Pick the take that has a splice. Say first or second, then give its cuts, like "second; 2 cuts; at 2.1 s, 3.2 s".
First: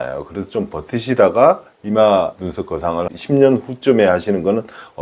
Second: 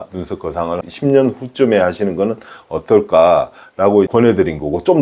second; 1 cut; at 4.1 s